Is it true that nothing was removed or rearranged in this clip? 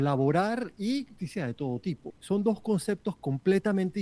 no; 2 cuts; at 1.1 s, 2.1 s

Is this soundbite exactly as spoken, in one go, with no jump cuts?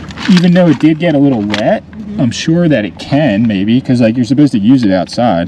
yes; 0 cuts

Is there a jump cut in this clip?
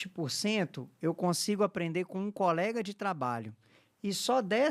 no; 0 cuts

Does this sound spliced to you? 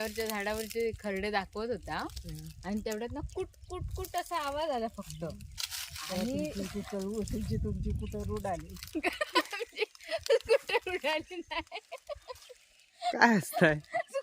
no; 0 cuts

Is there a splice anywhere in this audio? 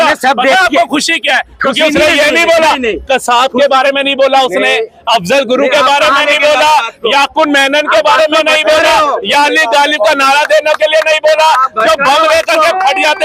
no; 0 cuts

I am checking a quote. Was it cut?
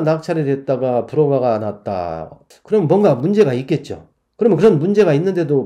no; 0 cuts

